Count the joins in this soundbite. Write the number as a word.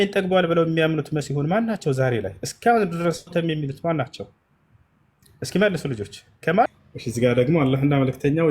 one